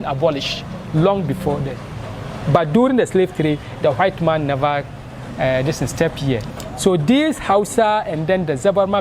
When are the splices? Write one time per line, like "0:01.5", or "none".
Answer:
0:06.5